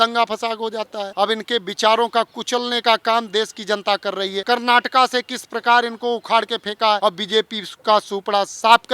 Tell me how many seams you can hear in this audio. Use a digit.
3